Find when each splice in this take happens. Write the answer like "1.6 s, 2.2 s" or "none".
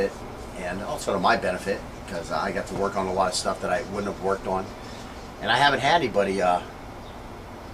5.4 s